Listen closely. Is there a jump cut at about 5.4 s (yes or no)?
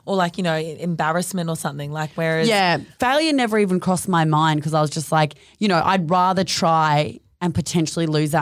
yes